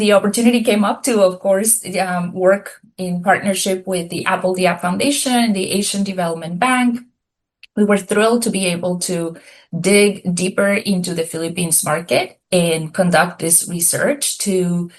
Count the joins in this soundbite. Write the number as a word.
zero